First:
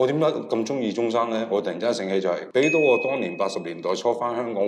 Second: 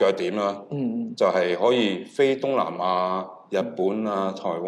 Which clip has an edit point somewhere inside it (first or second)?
first